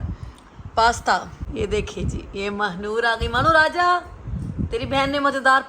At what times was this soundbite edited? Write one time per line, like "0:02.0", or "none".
0:01.4